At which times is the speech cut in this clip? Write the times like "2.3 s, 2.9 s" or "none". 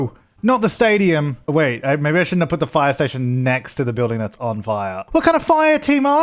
1.4 s, 5.0 s